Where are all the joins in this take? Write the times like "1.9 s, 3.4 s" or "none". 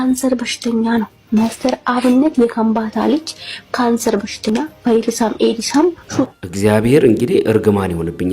6.4 s